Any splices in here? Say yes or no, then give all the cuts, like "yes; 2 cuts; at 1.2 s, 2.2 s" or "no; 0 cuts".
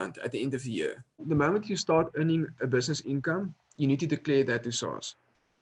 yes; 1 cut; at 1.2 s